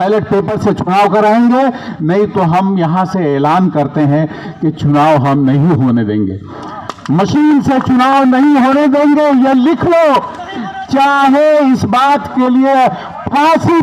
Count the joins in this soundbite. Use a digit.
0